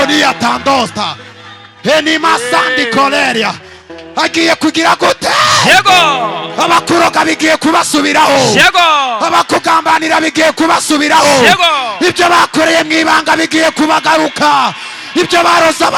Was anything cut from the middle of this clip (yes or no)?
no